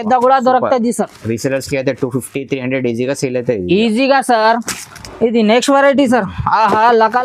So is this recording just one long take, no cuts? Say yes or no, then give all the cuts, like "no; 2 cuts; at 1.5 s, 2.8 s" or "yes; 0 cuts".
yes; 0 cuts